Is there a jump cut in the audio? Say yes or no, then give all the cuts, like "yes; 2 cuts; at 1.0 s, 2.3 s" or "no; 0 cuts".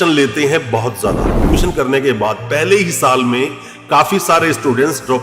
yes; 1 cut; at 1.5 s